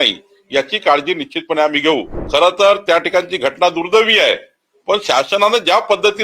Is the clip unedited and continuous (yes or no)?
no